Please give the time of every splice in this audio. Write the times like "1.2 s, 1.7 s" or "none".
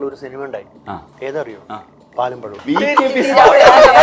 2.6 s